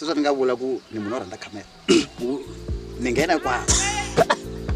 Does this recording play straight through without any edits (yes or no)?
yes